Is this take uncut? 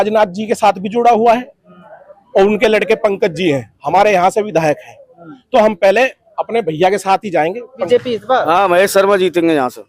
no; 1 cut; at 7.8 s

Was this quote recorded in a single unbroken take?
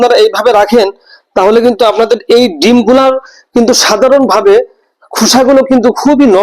yes; 0 cuts

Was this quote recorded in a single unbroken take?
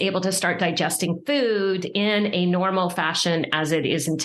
yes; 0 cuts

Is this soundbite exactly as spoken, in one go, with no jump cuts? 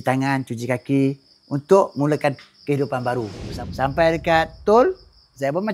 no; 1 cut; at 3.4 s

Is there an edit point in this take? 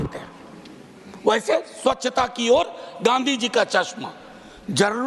no; 0 cuts

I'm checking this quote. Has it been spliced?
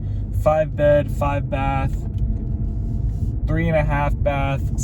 no; 0 cuts

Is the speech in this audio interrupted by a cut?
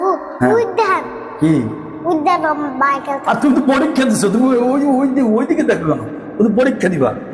no; 0 cuts

